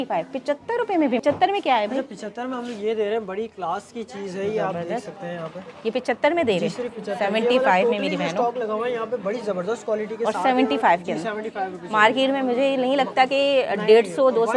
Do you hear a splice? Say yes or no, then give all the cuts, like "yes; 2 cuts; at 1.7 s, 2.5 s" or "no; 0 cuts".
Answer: yes; 1 cut; at 1.2 s